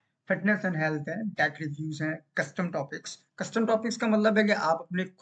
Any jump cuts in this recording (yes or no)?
no